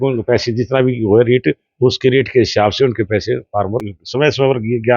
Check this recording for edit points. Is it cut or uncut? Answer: cut